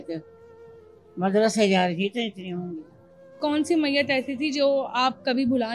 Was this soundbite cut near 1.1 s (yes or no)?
no